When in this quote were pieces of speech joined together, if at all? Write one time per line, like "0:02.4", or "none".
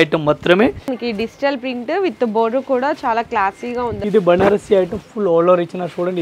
0:01.0
0:04.0